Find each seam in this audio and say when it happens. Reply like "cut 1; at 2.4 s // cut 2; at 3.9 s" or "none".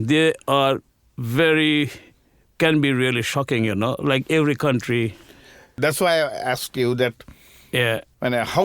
cut 1; at 5.7 s